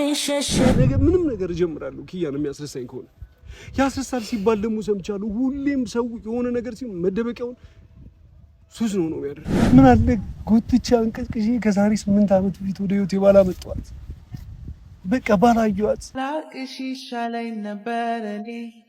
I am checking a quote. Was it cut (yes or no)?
yes